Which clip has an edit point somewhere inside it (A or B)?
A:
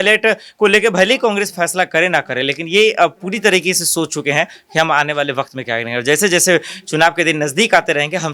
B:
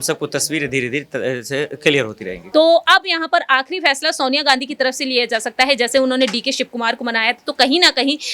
B